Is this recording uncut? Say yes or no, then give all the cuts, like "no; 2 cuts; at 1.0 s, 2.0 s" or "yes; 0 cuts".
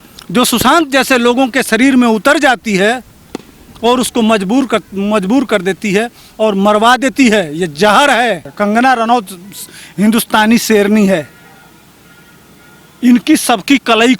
no; 1 cut; at 8.5 s